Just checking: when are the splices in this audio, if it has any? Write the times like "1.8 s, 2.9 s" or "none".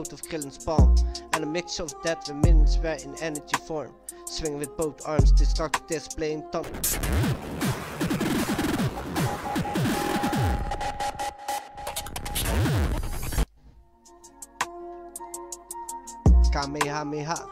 6.7 s, 13.4 s